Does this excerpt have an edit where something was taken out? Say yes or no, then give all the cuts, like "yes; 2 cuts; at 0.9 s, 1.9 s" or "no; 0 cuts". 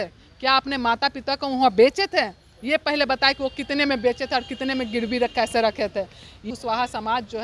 yes; 1 cut; at 6.4 s